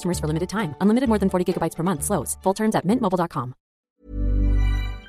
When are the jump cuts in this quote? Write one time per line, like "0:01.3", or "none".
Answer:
0:03.9